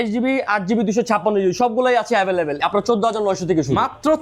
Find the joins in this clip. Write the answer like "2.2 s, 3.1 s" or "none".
none